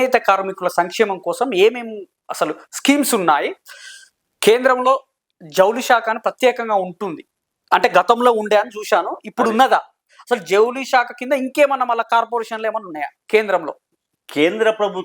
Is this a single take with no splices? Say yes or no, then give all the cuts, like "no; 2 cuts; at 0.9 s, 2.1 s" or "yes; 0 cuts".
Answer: yes; 0 cuts